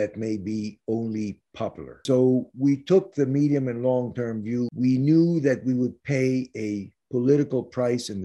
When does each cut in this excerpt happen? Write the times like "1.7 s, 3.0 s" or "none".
2.0 s, 4.7 s